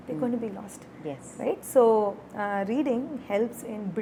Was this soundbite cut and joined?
no; 0 cuts

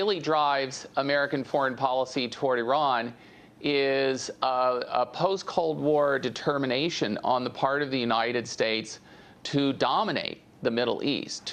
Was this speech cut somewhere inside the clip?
yes; 1 cut; at 5.4 s

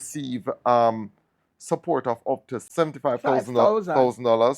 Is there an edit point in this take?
yes; 1 cut; at 2.7 s

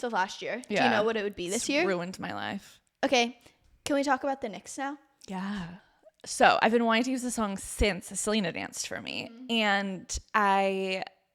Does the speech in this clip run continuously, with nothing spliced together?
no; 2 cuts; at 2.8 s, 5.7 s

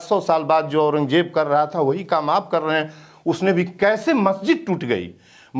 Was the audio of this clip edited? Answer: no; 0 cuts

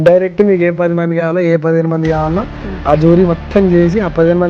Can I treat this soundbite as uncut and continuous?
yes; 0 cuts

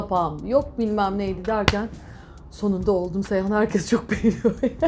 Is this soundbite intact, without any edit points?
yes; 0 cuts

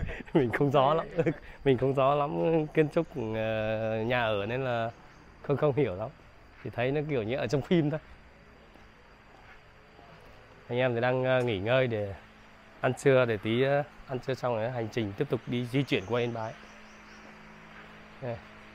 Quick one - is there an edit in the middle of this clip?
no; 0 cuts

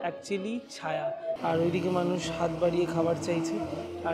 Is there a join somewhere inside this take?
yes; 1 cut; at 1.4 s

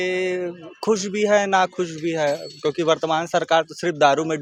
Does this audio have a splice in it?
no; 0 cuts

